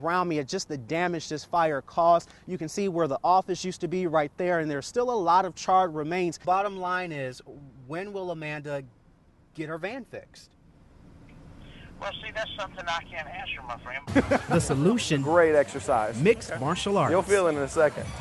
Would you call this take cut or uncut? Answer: cut